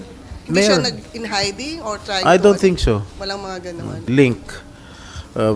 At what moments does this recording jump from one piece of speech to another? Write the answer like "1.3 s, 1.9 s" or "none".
4.0 s